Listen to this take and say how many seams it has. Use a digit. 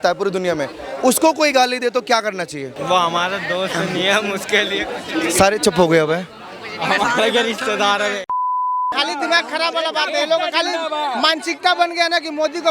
2